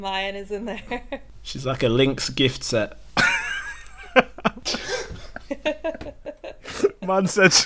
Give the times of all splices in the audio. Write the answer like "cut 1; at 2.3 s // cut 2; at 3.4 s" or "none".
cut 1; at 1.3 s // cut 2; at 3.0 s // cut 3; at 4.6 s